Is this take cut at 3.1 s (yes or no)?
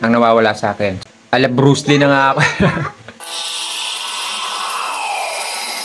yes